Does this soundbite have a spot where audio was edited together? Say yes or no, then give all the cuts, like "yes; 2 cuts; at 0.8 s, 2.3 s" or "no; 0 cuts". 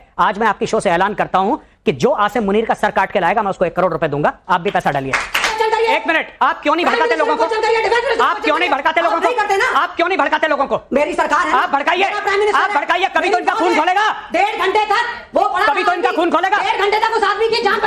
yes; 1 cut; at 5.5 s